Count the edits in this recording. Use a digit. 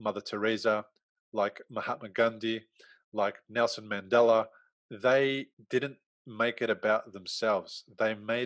2